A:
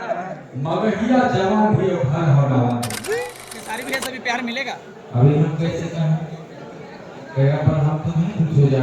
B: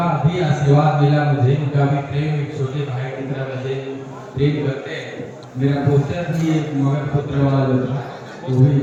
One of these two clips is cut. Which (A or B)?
A